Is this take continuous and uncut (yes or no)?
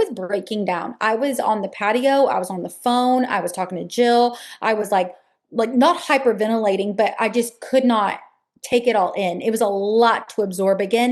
yes